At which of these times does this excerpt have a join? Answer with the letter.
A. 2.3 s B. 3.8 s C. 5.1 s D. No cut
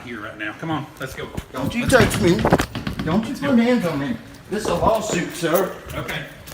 D